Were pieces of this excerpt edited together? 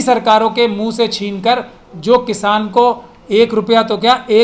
no; 0 cuts

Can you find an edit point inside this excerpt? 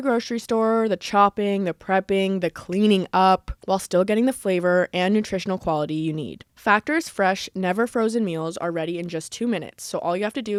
no; 0 cuts

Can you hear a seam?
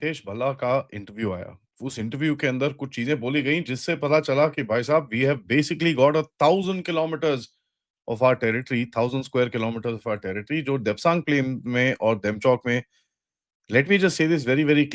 no; 0 cuts

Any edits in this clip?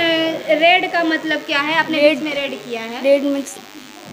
no; 0 cuts

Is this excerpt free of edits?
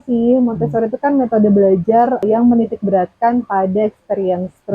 no; 1 cut; at 2.2 s

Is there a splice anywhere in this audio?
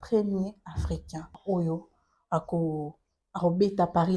yes; 1 cut; at 1.3 s

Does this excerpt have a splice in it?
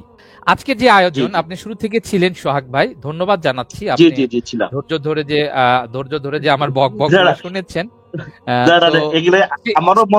no; 0 cuts

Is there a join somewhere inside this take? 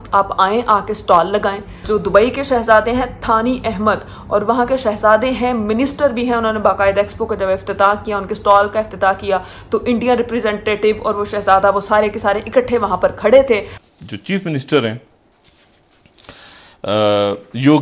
yes; 2 cuts; at 1.8 s, 13.8 s

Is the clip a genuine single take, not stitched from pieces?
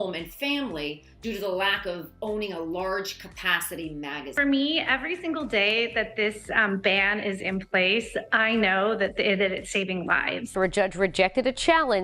no; 2 cuts; at 4.3 s, 10.5 s

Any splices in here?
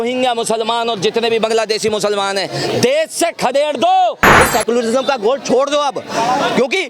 yes; 1 cut; at 4.4 s

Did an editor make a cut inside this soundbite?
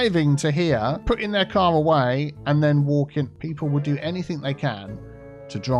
yes; 2 cuts; at 1.0 s, 3.4 s

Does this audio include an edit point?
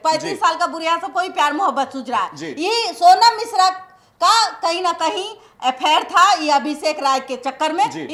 no; 0 cuts

